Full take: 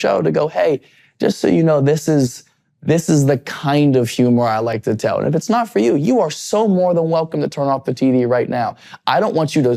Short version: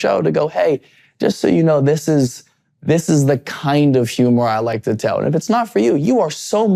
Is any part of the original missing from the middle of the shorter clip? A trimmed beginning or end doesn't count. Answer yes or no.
no